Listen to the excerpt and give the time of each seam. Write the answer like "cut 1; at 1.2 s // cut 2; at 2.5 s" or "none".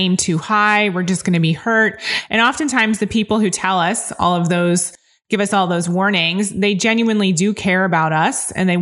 none